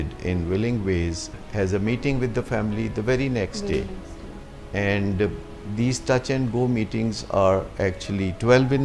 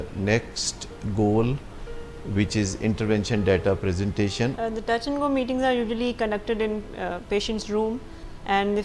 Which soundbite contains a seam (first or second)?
second